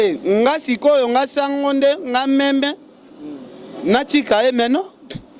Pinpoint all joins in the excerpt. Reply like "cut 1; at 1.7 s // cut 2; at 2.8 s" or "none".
none